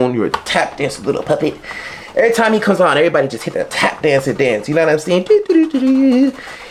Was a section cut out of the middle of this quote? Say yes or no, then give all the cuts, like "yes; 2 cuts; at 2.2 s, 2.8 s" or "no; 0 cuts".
no; 0 cuts